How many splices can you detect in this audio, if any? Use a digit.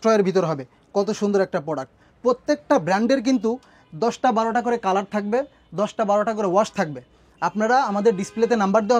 0